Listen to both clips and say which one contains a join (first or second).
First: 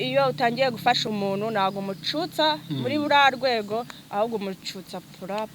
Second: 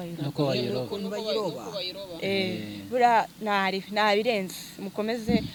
first